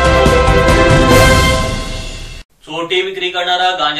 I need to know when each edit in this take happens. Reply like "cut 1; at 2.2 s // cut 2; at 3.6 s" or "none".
cut 1; at 2.4 s